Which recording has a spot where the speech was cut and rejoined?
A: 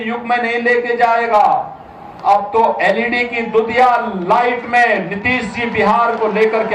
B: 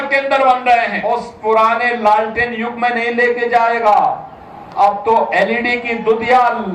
B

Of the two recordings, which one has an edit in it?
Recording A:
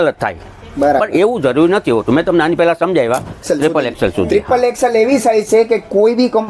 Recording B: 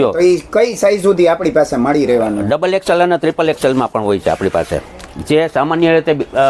A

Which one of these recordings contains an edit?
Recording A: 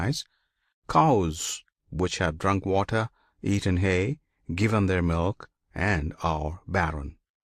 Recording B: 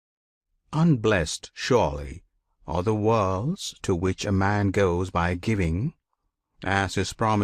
A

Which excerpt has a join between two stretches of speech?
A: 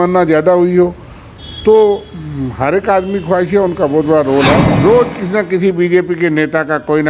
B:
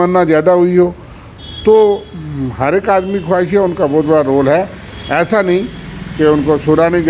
A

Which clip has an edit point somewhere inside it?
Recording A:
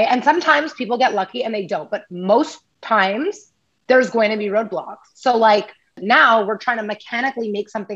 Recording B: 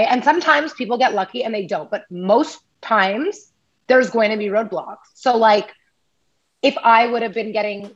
A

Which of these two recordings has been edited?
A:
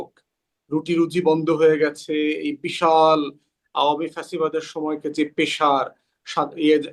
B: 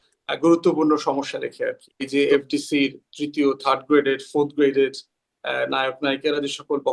B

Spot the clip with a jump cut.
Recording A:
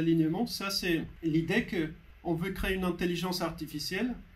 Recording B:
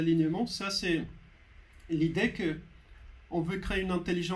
A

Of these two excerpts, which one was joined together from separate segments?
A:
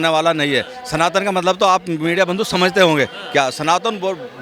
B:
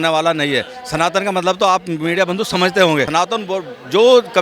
B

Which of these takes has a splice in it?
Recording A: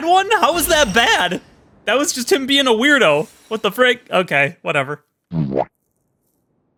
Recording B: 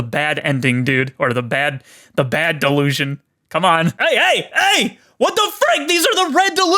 B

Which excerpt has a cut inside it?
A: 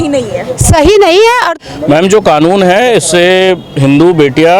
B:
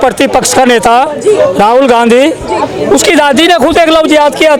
A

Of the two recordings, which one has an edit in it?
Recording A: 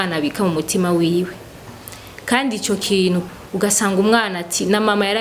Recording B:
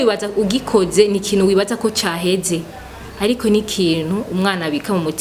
A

